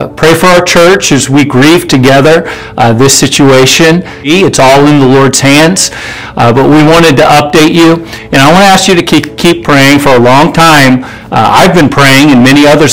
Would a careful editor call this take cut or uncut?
cut